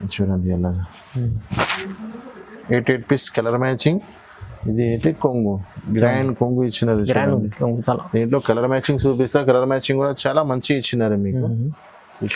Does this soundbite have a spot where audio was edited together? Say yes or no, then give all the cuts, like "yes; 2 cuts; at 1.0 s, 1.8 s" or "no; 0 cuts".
no; 0 cuts